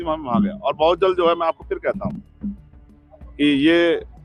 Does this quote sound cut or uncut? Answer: uncut